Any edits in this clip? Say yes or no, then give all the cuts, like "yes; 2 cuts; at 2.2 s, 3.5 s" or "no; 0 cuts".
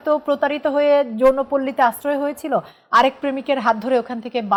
no; 0 cuts